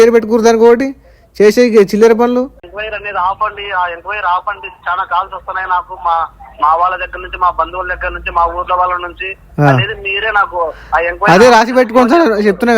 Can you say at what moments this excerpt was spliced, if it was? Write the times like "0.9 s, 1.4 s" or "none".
2.7 s